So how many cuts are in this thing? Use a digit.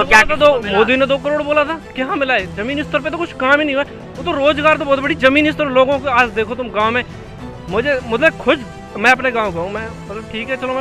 0